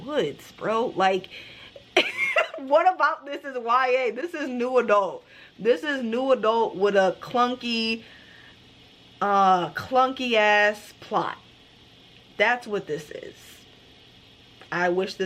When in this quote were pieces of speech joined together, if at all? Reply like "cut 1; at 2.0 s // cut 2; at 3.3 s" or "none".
none